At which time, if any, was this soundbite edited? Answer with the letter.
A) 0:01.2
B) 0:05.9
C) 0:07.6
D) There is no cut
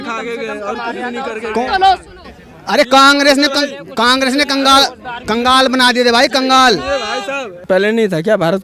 C